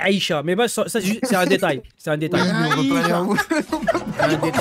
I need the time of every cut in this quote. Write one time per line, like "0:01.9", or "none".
none